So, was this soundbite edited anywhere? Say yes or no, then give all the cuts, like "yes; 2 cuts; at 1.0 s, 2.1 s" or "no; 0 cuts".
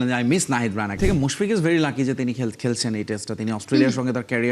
yes; 1 cut; at 1.0 s